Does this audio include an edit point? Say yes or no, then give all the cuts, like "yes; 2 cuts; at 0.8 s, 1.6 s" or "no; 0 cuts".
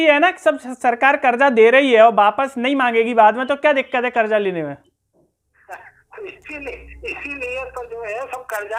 no; 0 cuts